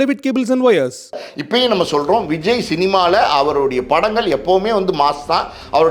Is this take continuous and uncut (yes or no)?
no